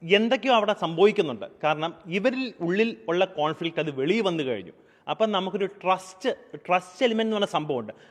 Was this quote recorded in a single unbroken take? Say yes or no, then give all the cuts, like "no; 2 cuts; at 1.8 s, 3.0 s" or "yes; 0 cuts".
yes; 0 cuts